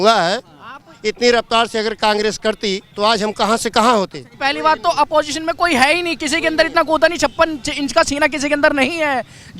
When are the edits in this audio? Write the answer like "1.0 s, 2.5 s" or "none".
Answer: 2.9 s, 4.2 s